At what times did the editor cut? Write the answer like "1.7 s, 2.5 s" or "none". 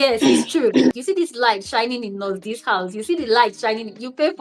0.9 s